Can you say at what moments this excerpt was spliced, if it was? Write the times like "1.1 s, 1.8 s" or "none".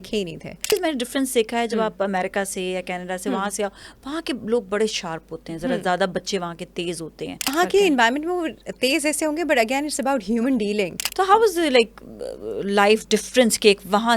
0.7 s, 7.5 s, 11.0 s